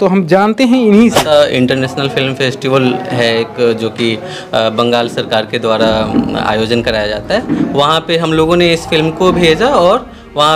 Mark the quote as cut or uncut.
cut